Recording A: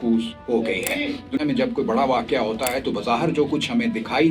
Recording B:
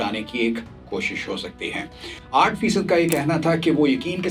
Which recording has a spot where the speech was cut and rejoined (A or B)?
A